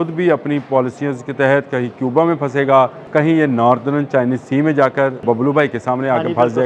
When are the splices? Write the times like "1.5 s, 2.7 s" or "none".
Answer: 3.0 s, 5.2 s